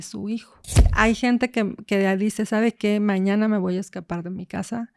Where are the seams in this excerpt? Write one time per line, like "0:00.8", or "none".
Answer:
0:00.9